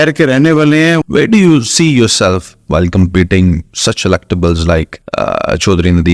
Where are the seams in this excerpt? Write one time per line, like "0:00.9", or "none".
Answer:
0:01.0
0:05.0

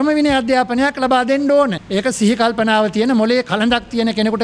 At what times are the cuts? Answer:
0:01.8

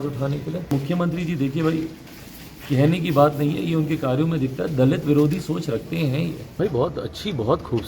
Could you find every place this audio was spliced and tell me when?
0:00.7
0:06.4

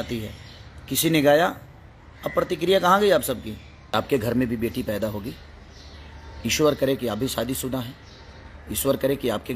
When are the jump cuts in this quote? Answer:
0:03.9

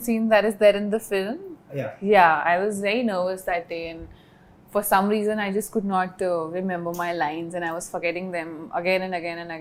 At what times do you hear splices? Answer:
none

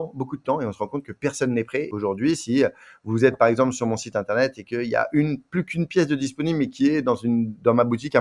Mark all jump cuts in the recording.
0:01.9

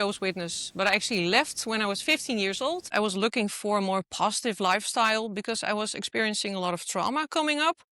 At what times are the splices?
0:02.9

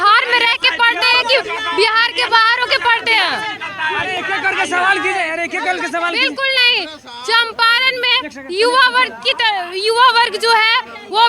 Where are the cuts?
none

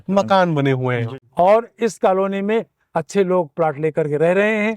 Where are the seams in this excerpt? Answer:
0:01.2

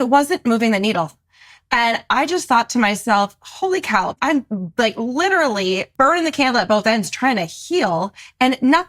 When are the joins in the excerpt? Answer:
0:04.1
0:05.9

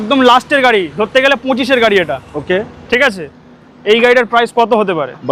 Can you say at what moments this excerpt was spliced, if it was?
none

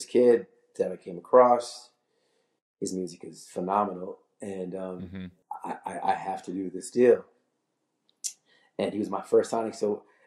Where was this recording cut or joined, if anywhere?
none

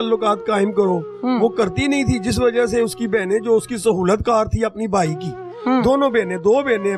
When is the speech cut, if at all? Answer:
none

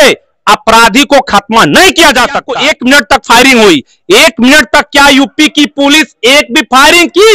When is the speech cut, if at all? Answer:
0:02.5

